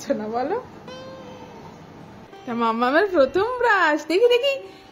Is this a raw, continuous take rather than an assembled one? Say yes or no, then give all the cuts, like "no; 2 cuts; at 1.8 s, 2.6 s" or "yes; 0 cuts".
no; 1 cut; at 2.3 s